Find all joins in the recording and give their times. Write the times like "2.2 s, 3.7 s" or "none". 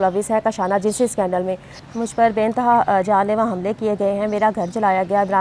1.7 s